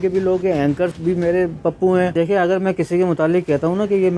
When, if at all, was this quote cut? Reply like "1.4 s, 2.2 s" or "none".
1.0 s, 2.2 s